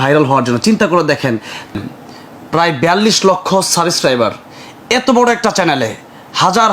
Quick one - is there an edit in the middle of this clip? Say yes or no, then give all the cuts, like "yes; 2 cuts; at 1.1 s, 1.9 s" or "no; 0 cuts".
yes; 1 cut; at 1.7 s